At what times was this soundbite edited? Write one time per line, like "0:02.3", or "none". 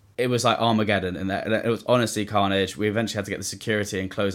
none